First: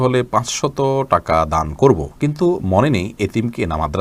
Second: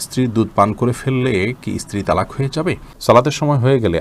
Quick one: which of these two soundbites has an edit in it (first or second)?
second